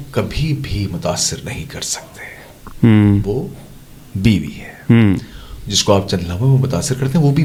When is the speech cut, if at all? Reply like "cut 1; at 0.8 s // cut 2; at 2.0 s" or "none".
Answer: none